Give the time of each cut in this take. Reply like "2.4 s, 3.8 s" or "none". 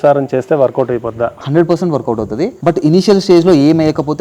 2.6 s